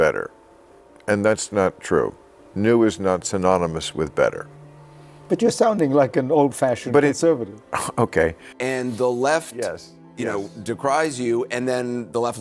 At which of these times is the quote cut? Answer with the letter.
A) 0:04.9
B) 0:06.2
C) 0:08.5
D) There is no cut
C